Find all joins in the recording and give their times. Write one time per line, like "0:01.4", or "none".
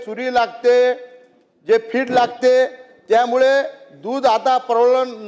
none

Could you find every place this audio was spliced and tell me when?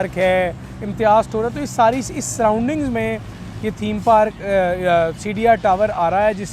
none

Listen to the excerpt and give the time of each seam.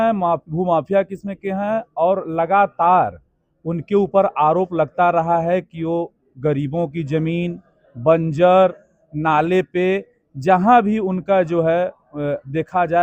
none

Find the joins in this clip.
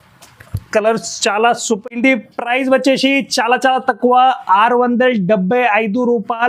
none

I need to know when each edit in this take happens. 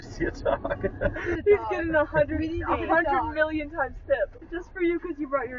0:01.4
0:04.4

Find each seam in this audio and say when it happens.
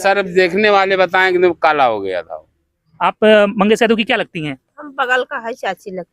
0:02.9

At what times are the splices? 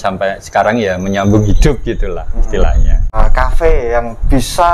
0:03.2

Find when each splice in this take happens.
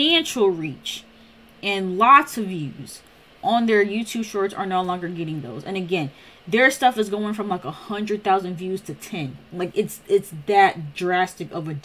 none

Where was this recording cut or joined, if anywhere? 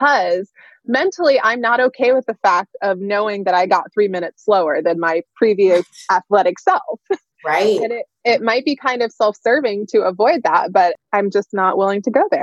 0:11.0

